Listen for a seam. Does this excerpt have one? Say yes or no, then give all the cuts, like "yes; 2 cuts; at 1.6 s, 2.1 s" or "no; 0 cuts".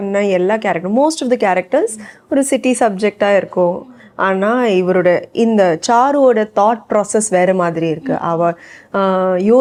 no; 0 cuts